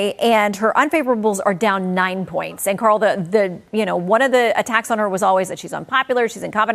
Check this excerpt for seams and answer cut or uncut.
uncut